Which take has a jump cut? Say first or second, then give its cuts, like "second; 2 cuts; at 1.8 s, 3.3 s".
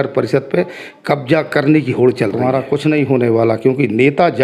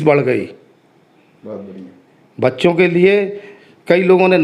first; 1 cut; at 2.3 s